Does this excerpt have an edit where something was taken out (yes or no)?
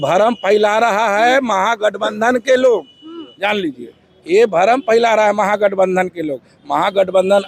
no